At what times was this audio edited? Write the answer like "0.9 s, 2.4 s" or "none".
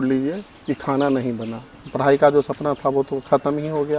1.8 s